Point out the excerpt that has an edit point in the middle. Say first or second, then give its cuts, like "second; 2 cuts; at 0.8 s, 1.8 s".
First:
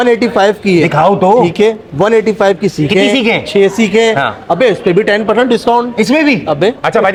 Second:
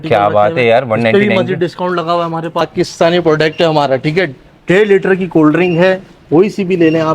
second; 1 cut; at 2.6 s